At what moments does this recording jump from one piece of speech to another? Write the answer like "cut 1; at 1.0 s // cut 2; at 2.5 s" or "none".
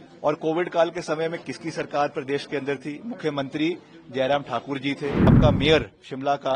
cut 1; at 5.4 s